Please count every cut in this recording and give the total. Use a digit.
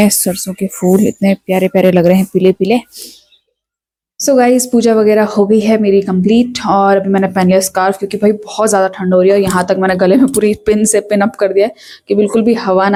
0